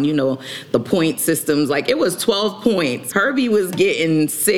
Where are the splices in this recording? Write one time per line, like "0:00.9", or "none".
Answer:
0:03.0